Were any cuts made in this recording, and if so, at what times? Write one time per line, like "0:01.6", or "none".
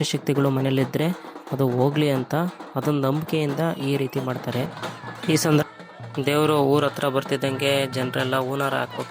0:05.6